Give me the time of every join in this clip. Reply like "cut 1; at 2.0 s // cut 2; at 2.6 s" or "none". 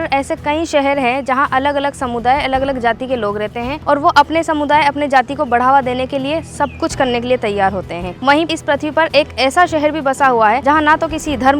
cut 1; at 3.8 s // cut 2; at 8.4 s // cut 3; at 10.6 s